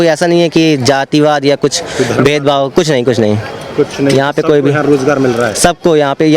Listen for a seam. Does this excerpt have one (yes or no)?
no